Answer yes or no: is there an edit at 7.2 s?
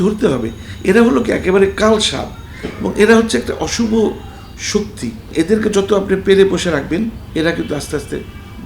yes